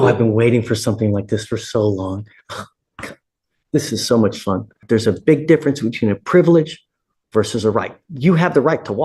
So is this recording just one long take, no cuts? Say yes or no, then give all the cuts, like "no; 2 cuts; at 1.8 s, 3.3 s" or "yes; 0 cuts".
no; 1 cut; at 4.8 s